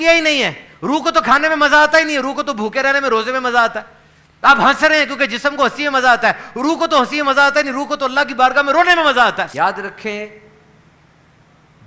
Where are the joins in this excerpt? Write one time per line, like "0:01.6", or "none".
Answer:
0:09.5